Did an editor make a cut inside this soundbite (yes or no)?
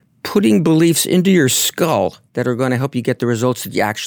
yes